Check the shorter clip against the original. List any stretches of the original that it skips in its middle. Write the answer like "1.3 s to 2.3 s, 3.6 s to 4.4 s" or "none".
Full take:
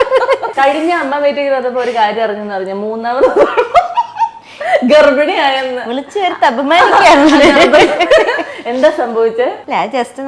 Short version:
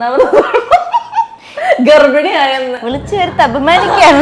none